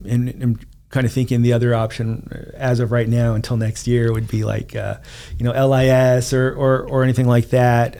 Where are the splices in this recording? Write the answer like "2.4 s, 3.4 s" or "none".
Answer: none